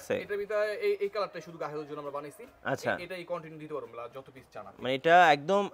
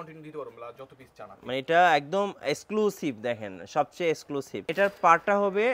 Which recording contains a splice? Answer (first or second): second